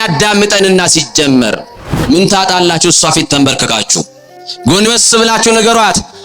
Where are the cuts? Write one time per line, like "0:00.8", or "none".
0:02.1